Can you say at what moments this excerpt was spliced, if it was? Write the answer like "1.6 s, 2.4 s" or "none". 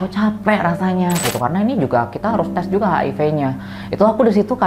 1.2 s